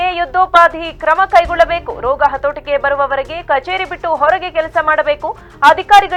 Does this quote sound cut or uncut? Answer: uncut